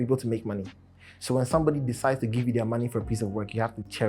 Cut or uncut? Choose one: uncut